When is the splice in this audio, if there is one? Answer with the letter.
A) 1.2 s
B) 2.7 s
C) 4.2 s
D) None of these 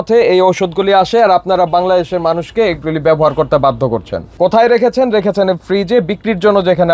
C